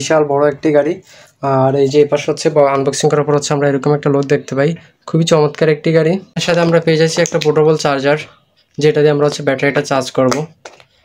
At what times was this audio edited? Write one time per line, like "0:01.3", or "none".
0:06.4